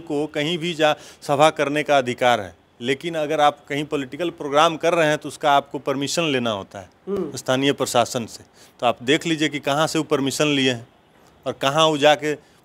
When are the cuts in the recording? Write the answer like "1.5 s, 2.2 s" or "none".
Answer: none